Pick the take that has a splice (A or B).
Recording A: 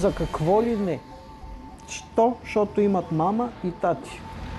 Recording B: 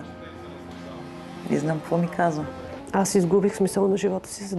B